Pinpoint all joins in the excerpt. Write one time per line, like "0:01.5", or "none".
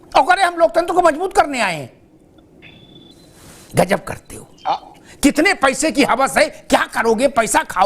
0:03.1